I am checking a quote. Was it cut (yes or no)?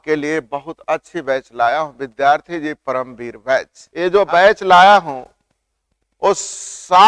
yes